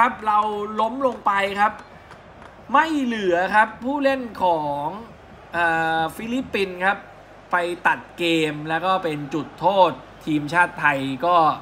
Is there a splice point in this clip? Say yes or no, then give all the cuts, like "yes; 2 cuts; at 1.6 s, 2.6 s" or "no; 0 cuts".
no; 0 cuts